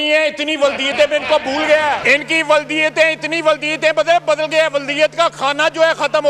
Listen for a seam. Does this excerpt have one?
yes; 1 cut; at 2.0 s

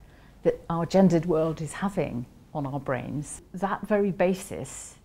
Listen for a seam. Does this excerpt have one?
yes; 1 cut; at 3.3 s

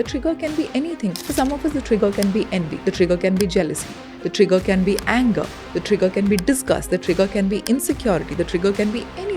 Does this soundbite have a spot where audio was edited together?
yes; 2 cuts; at 1.2 s, 2.7 s

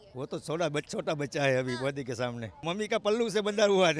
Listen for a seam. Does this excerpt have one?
yes; 1 cut; at 2.7 s

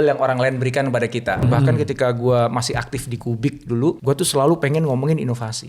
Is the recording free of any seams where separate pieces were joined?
no; 2 cuts; at 1.4 s, 4.0 s

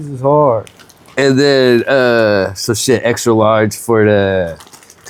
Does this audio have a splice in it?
no; 0 cuts

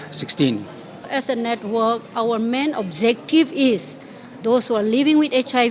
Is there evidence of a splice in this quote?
yes; 1 cut; at 1.1 s

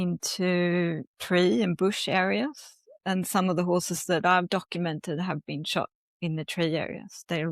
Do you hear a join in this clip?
no; 0 cuts

